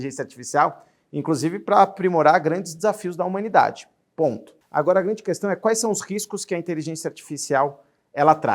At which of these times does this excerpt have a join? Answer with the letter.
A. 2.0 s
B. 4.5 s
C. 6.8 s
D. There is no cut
B